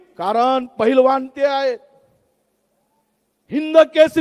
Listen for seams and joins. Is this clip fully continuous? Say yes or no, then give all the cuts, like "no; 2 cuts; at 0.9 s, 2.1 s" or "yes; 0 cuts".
yes; 0 cuts